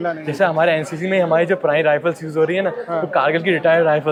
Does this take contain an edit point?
no; 0 cuts

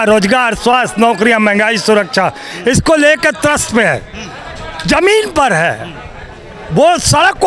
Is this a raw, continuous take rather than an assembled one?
yes; 0 cuts

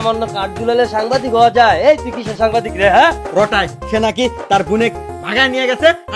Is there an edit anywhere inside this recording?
yes; 1 cut; at 3.2 s

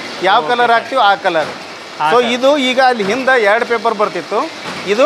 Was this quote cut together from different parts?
no; 0 cuts

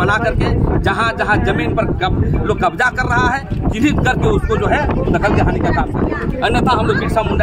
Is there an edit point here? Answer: no; 0 cuts

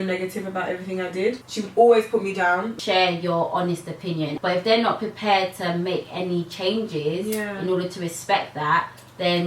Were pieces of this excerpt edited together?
yes; 2 cuts; at 2.7 s, 4.3 s

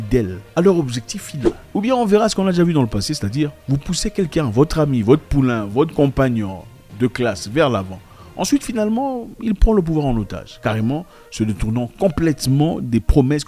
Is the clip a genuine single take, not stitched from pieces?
yes; 0 cuts

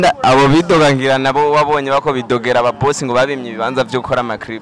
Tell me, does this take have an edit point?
no; 0 cuts

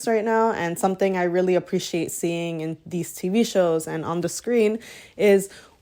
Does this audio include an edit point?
no; 0 cuts

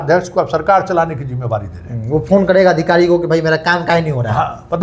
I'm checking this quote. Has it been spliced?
no; 0 cuts

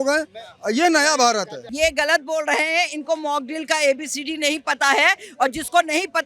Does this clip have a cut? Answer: yes; 1 cut; at 1.6 s

